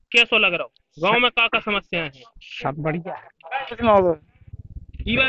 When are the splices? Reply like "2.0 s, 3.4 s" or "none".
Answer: 3.8 s